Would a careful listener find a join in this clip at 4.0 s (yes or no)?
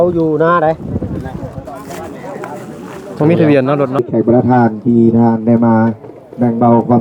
yes